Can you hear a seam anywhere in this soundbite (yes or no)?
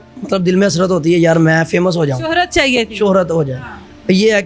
no